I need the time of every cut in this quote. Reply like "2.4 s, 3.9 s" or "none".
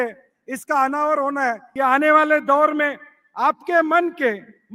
1.6 s